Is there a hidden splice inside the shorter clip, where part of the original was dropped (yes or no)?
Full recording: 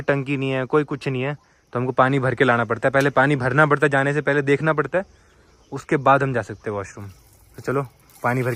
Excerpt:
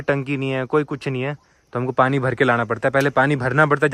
no